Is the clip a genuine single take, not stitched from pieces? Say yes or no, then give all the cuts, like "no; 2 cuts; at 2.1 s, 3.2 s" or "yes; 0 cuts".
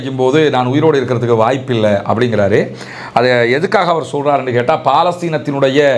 yes; 0 cuts